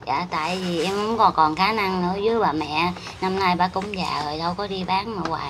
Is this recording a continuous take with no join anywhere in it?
yes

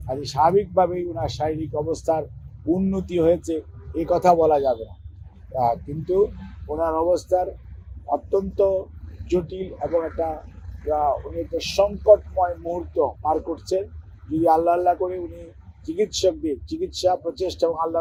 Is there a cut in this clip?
no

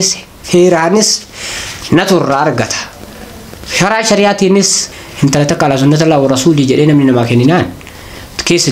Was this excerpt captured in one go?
no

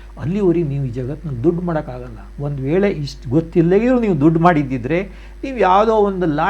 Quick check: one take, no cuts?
yes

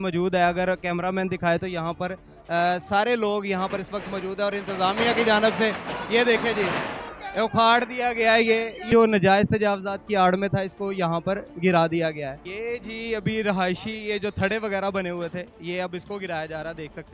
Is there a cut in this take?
yes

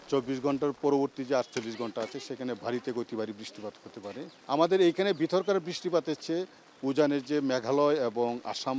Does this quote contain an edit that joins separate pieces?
no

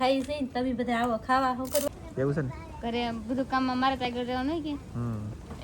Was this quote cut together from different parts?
yes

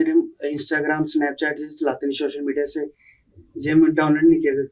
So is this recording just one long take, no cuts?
yes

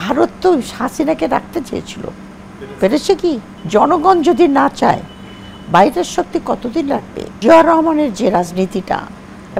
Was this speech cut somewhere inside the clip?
yes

